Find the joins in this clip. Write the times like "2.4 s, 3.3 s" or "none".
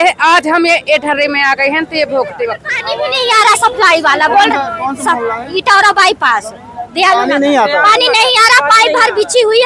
2.7 s

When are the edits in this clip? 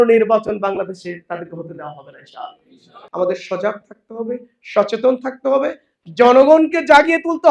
3.0 s

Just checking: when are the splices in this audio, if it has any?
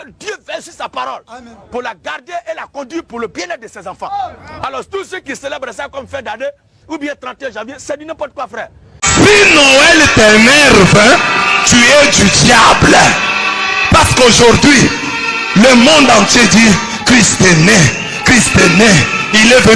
9.0 s

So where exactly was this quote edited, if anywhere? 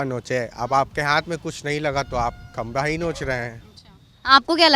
none

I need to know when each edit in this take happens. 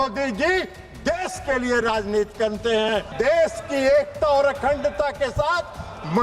3.1 s

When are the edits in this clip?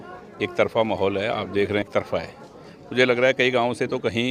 1.9 s

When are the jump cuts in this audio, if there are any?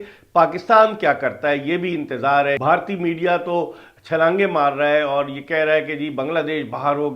2.6 s

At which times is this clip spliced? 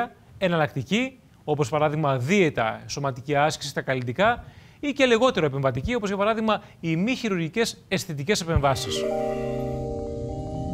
8.9 s

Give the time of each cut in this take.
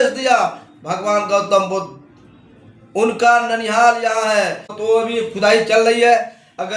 4.8 s

